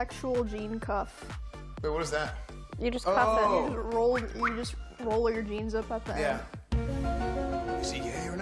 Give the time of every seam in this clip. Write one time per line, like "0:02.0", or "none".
none